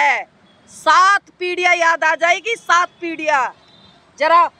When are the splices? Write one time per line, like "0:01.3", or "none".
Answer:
none